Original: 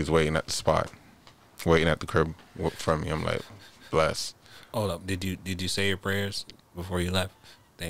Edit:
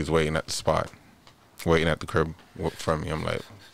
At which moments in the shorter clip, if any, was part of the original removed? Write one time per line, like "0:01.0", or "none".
none